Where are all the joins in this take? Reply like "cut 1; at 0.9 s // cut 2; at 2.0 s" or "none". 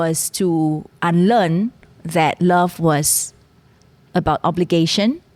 none